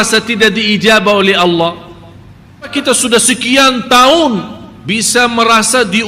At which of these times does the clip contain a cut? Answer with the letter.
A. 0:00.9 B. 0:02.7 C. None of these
B